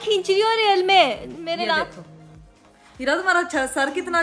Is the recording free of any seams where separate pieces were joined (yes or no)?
yes